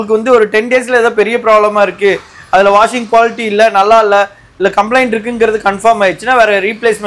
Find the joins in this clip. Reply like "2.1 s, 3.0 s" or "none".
none